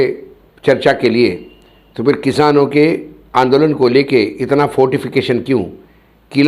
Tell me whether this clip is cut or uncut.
uncut